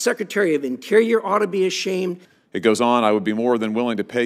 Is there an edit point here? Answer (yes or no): yes